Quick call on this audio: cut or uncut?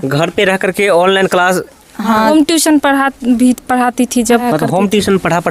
cut